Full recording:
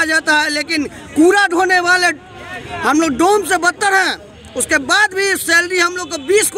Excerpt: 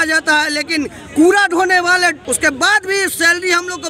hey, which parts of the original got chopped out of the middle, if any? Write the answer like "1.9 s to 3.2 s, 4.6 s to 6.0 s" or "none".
2.2 s to 4.5 s